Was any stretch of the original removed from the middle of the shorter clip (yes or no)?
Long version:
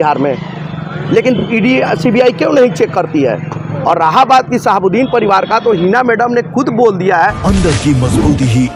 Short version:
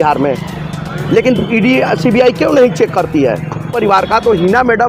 yes